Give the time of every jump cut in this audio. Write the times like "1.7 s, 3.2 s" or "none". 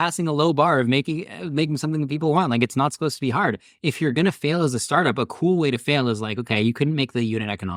none